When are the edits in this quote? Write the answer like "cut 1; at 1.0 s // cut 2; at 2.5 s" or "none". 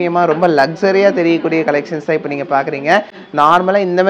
none